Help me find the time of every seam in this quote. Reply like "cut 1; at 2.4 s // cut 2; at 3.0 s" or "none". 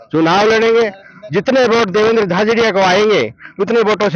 none

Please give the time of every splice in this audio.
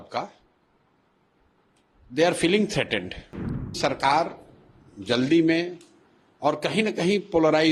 cut 1; at 3.7 s

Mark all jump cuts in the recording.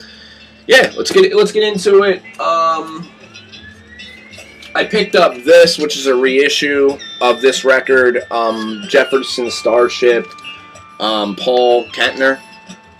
cut 1; at 8.0 s

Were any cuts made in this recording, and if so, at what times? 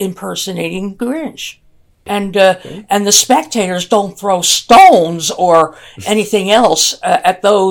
cut 1; at 2.0 s

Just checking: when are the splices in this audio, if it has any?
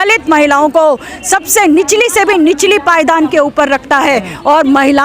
none

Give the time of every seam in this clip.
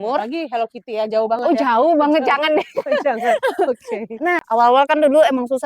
cut 1; at 4.4 s

